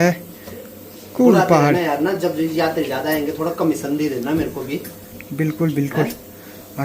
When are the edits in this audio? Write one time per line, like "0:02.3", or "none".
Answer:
none